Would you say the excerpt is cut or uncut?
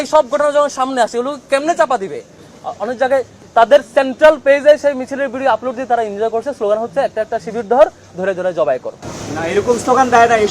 cut